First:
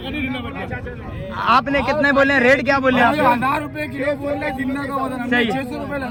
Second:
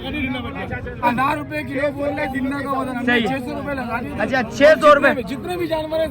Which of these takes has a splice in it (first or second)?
second